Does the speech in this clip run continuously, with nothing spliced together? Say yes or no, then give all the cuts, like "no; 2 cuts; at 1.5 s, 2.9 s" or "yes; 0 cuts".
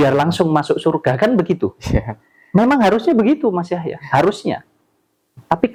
yes; 0 cuts